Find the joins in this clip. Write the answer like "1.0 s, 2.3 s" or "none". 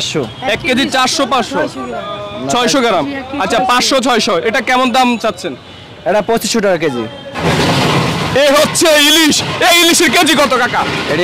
7.4 s